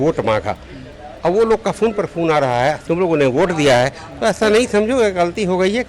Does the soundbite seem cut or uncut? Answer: cut